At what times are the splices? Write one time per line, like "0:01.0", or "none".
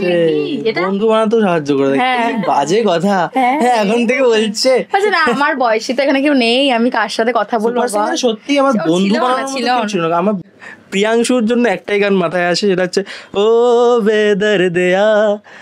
0:10.5